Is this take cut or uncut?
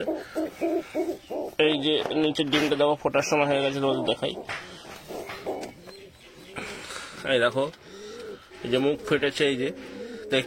uncut